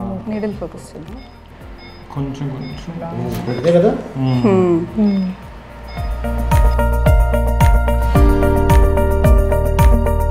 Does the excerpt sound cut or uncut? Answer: uncut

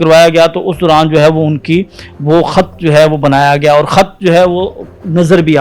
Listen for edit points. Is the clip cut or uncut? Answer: uncut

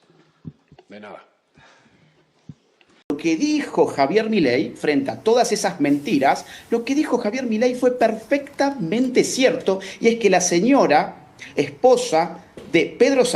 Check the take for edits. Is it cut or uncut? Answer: cut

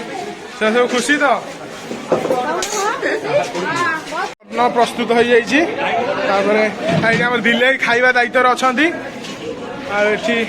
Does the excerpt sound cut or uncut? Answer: cut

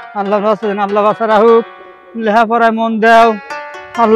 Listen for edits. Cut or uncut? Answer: uncut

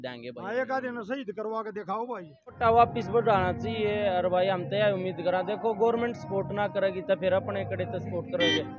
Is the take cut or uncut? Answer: cut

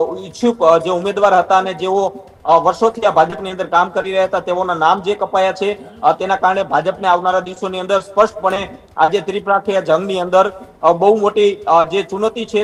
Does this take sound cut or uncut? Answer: uncut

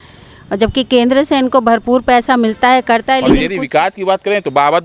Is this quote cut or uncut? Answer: cut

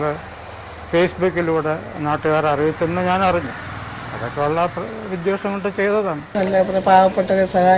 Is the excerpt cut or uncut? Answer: cut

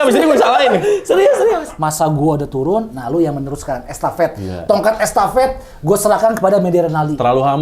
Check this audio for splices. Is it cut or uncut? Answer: cut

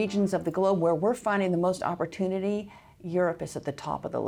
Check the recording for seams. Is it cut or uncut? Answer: uncut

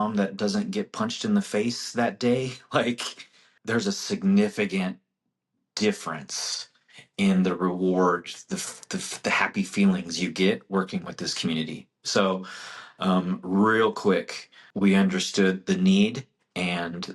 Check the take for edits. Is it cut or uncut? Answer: uncut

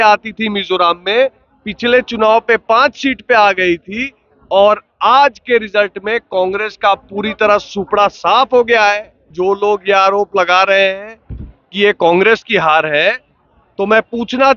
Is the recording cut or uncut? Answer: cut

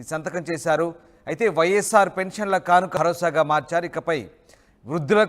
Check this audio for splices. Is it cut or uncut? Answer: cut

